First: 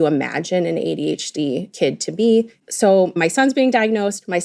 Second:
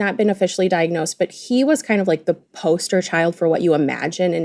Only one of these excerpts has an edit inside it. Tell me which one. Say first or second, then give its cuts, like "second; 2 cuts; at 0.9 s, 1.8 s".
first; 2 cuts; at 1.7 s, 2.5 s